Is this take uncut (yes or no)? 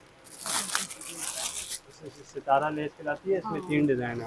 yes